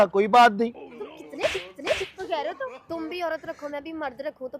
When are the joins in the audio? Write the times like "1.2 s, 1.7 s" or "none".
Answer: 2.8 s